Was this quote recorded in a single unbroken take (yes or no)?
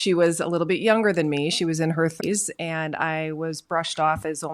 no